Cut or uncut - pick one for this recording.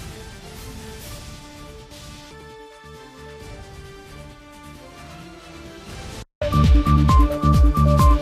uncut